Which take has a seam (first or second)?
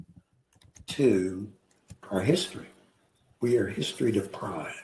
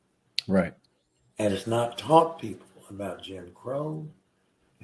first